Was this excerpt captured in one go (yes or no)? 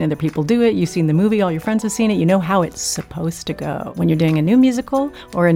no